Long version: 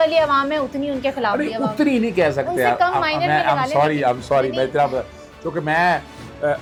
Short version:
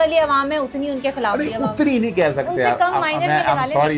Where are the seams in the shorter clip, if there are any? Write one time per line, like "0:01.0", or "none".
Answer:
none

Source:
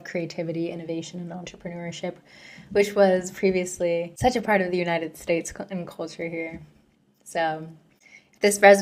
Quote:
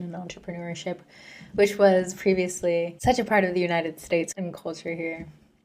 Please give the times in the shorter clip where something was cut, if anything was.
0:04.3

